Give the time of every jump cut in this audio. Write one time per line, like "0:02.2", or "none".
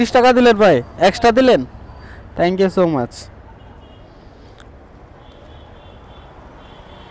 none